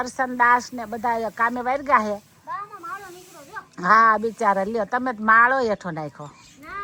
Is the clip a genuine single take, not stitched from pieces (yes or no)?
yes